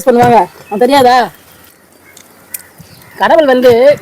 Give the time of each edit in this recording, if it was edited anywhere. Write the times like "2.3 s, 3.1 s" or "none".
1.7 s